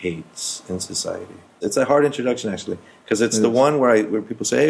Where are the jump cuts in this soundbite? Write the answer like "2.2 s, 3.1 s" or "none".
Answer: 1.6 s